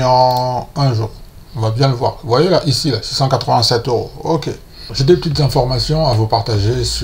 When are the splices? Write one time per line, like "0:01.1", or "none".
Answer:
0:04.9